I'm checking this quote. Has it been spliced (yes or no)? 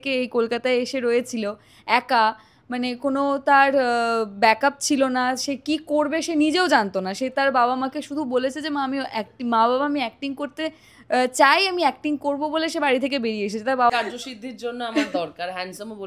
yes